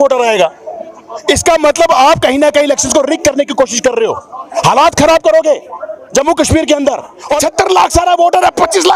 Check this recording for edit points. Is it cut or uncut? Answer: cut